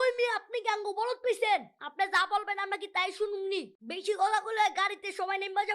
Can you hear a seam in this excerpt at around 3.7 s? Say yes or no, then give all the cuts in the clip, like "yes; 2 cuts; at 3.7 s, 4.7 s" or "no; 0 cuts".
yes; 1 cut; at 3.7 s